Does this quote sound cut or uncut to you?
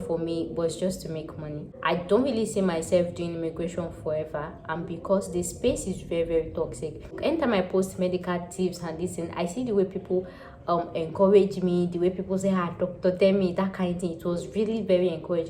cut